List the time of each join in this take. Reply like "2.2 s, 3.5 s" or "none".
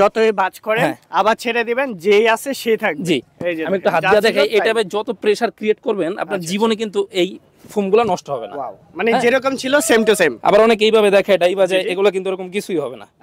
none